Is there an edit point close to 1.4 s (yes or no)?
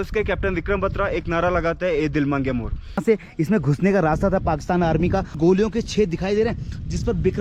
no